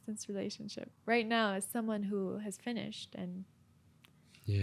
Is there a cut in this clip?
no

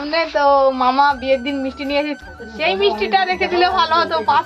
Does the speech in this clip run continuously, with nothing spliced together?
no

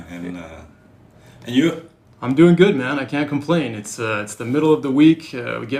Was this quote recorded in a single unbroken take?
yes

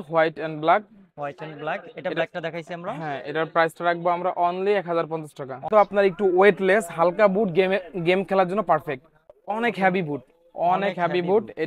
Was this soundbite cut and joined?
yes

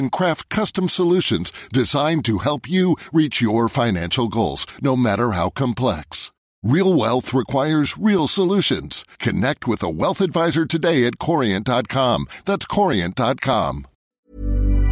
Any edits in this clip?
yes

